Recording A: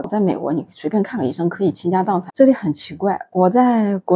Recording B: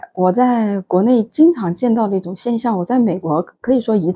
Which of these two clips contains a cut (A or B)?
A